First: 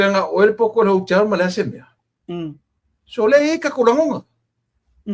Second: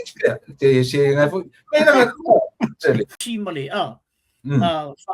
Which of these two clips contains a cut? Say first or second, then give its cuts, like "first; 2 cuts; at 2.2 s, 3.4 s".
second; 1 cut; at 3.2 s